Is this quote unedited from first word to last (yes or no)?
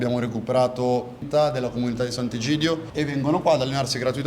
no